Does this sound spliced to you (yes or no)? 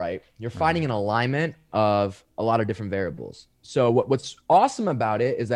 no